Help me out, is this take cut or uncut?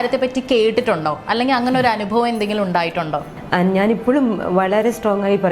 cut